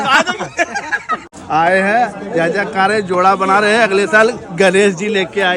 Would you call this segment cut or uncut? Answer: cut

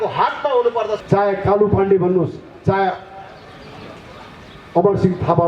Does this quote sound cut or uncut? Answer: cut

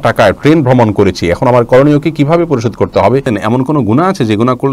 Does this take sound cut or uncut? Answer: cut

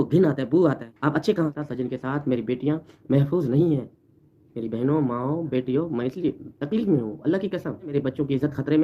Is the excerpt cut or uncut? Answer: cut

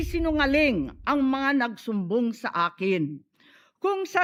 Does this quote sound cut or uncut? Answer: uncut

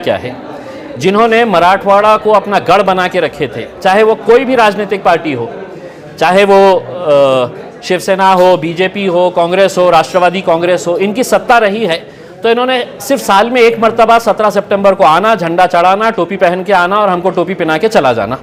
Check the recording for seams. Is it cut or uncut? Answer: uncut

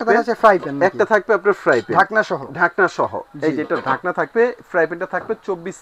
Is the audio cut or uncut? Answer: uncut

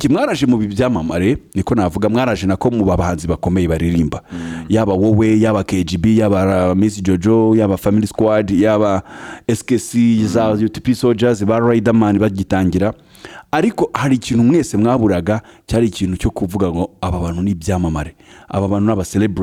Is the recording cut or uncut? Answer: uncut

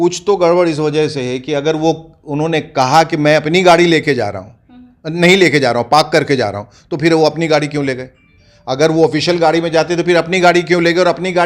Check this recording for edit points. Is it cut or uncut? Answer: uncut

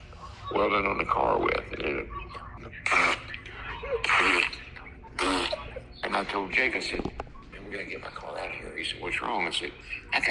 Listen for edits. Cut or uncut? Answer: cut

